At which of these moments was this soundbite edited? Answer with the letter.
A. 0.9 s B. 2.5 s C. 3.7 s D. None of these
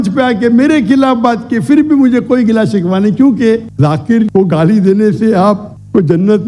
C